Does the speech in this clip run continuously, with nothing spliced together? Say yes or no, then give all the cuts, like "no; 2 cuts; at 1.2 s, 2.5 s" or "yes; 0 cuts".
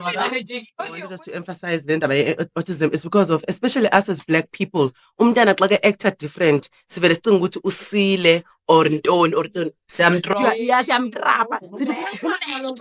no; 1 cut; at 1.1 s